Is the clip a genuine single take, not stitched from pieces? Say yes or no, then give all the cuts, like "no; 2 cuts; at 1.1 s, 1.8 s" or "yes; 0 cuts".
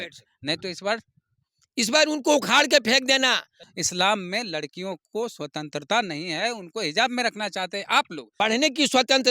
no; 2 cuts; at 3.5 s, 8.2 s